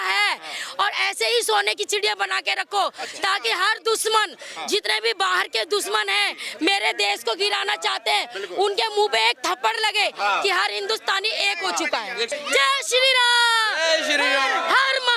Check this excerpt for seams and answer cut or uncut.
cut